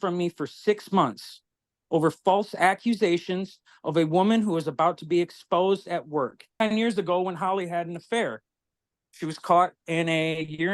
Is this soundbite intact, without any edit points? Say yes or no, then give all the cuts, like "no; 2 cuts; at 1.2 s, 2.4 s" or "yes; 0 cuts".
no; 1 cut; at 6.5 s